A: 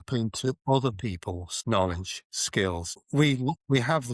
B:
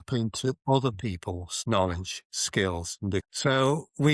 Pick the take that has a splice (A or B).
A